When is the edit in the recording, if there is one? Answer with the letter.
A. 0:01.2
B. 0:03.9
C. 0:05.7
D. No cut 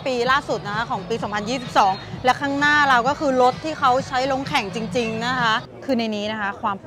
C